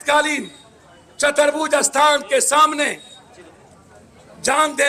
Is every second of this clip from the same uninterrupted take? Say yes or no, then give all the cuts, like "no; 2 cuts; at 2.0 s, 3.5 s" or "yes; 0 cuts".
yes; 0 cuts